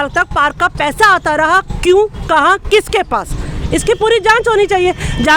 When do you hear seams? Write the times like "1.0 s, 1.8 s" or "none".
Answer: none